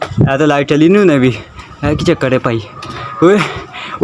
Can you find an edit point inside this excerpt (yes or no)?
no